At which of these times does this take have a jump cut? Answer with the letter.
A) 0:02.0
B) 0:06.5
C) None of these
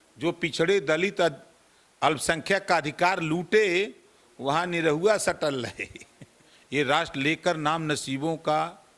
B